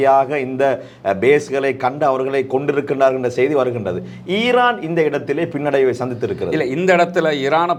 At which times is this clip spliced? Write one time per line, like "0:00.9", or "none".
none